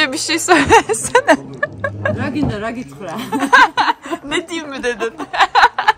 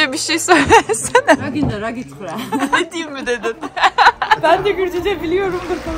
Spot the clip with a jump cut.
second; 3 cuts; at 1.4 s, 2.7 s, 4.4 s

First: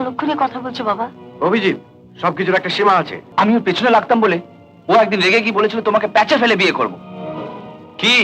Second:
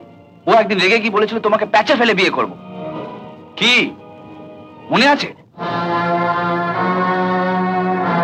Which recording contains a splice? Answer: first; 1 cut; at 3.2 s

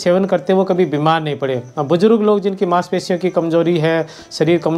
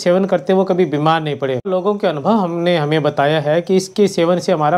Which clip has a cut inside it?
second; 1 cut; at 1.7 s

